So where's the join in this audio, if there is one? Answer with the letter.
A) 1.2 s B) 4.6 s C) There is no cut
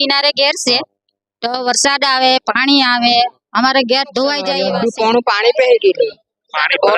B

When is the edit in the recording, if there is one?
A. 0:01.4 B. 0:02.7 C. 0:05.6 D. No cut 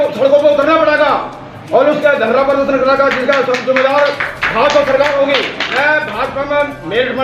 C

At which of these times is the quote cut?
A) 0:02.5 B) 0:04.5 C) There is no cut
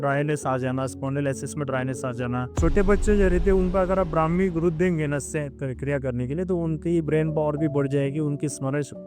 A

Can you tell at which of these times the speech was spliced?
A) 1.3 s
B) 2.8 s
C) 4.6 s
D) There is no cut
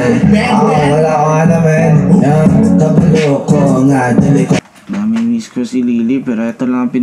C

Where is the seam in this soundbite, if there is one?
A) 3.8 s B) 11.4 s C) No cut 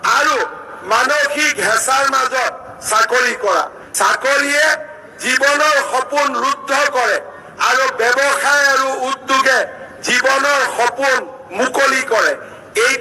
A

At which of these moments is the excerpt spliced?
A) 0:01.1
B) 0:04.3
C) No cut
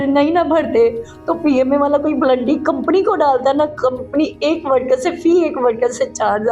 C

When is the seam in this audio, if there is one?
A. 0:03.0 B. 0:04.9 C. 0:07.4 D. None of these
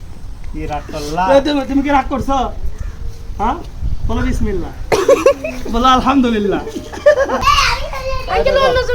C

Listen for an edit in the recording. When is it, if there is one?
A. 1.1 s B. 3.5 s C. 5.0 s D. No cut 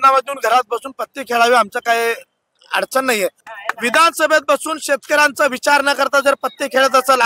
B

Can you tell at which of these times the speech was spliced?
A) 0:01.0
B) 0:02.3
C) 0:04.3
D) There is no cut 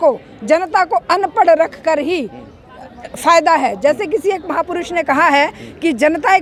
D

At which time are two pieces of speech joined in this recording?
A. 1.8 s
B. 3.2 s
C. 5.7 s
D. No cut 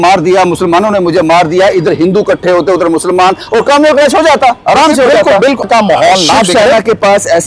C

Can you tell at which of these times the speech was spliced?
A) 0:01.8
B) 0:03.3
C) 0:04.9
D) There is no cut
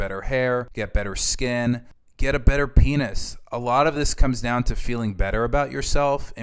D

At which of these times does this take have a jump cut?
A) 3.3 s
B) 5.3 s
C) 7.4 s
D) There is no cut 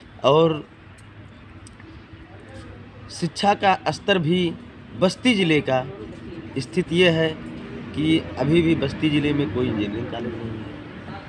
D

